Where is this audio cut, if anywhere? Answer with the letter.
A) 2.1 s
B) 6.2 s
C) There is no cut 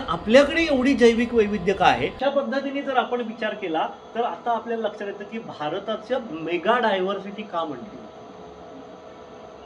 A